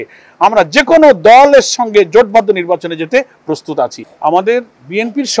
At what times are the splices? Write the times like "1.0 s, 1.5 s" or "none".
4.0 s

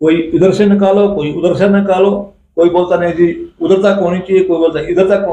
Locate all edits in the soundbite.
none

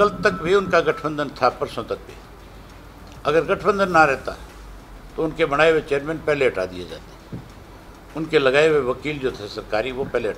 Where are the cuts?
none

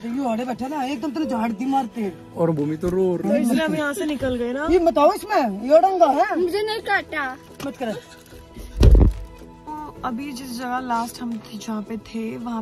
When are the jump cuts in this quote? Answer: none

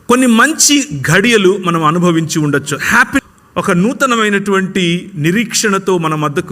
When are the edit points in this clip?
3.2 s

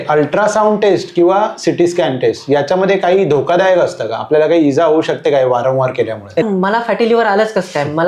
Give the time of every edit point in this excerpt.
6.4 s

